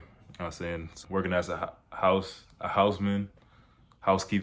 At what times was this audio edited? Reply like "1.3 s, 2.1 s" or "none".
1.0 s